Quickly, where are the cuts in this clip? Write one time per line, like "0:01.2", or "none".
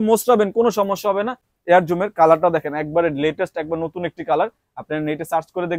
0:01.5